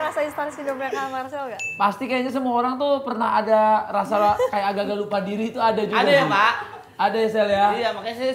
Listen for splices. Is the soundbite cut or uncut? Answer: cut